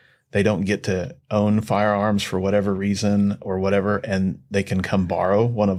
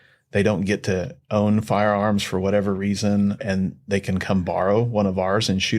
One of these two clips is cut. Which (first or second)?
second